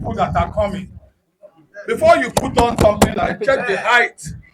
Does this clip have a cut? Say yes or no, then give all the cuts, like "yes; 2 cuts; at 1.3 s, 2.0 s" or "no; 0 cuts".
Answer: no; 0 cuts